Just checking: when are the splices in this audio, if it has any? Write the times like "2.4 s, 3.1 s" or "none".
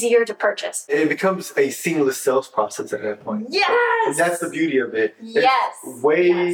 0.9 s